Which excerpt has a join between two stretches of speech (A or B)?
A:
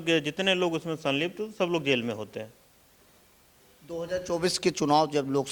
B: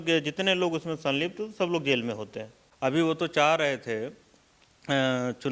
B